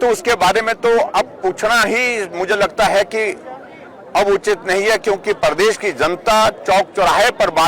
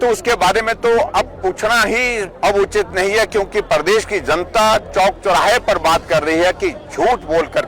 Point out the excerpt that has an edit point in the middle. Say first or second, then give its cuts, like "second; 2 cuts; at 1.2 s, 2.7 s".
second; 1 cut; at 2.3 s